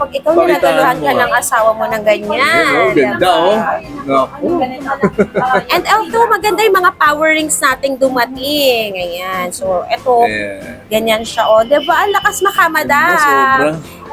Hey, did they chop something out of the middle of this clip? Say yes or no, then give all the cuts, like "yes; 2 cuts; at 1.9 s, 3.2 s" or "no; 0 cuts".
no; 0 cuts